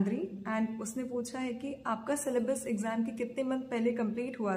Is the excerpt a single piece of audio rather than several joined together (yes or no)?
yes